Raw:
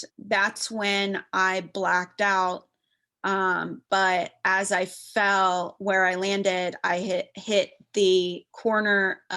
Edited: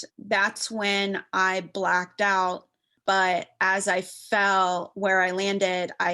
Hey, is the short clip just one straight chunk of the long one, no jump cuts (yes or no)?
no